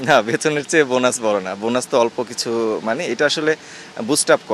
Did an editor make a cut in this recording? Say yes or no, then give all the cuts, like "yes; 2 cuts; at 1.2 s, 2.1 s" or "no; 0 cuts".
no; 0 cuts